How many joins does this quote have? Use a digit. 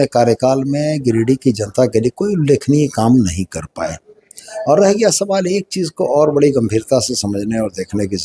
0